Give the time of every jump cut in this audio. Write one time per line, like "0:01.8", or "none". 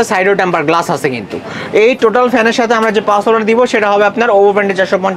none